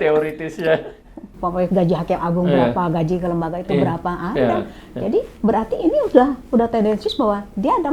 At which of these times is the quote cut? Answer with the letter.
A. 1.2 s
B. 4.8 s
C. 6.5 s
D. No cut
A